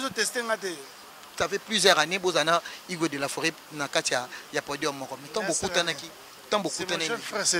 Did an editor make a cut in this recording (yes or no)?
yes